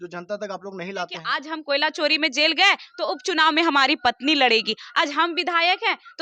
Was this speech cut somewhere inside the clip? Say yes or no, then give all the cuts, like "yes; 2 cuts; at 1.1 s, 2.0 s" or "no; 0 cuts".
yes; 1 cut; at 1.3 s